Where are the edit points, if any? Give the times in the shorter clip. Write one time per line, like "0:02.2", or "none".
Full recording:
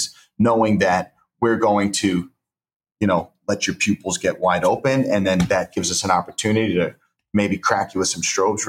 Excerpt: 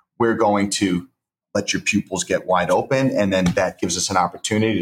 0:01.4